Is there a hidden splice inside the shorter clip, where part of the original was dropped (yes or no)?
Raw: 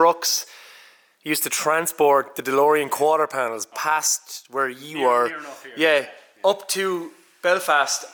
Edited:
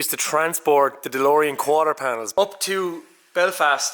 yes